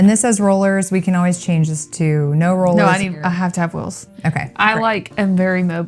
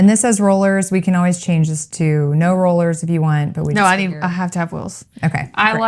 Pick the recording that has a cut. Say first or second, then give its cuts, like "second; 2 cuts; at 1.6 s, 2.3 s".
first; 1 cut; at 2.9 s